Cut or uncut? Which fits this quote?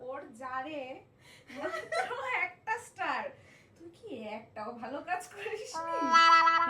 cut